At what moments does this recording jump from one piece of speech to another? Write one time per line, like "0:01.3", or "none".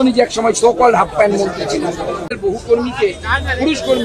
0:02.3